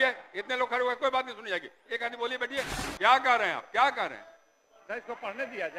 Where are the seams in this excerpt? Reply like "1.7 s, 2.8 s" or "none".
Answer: 2.8 s